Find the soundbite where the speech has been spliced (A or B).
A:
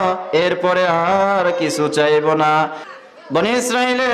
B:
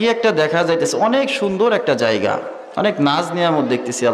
A